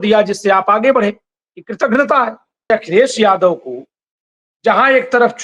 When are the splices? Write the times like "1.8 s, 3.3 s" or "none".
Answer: 2.7 s